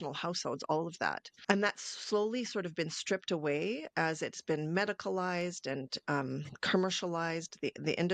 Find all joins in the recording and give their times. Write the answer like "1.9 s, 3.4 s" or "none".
none